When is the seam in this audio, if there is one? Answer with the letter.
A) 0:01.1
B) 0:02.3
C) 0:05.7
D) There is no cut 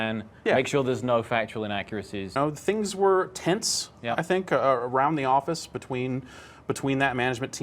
B